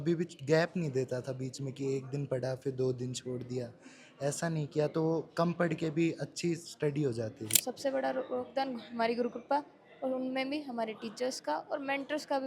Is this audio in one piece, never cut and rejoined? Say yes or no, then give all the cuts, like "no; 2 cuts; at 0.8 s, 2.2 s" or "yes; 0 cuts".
no; 1 cut; at 7.6 s